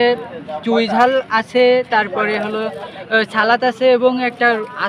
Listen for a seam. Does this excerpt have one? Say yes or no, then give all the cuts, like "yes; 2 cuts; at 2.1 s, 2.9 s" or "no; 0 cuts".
no; 0 cuts